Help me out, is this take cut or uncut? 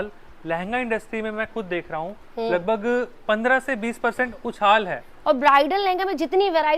cut